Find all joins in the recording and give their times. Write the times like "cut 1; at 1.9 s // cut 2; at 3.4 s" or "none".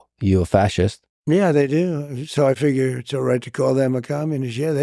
cut 1; at 1.1 s